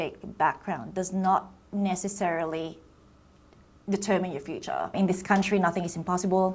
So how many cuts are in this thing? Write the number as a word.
one